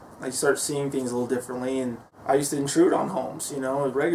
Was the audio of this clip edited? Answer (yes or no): yes